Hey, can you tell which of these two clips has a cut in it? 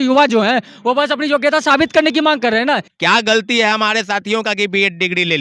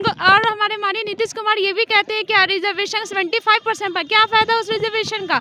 first; 1 cut; at 2.9 s

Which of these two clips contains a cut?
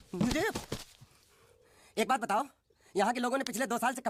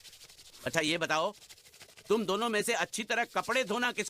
second; 1 cut; at 1.4 s

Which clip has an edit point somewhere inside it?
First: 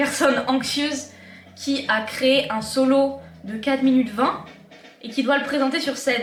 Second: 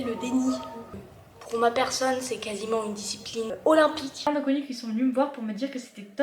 second; 1 cut; at 4.3 s

